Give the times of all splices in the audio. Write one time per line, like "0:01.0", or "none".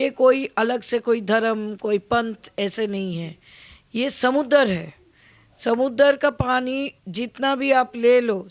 none